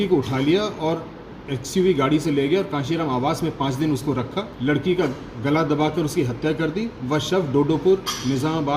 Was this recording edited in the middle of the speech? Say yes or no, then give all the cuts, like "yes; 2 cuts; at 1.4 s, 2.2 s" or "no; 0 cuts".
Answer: yes; 1 cut; at 4.4 s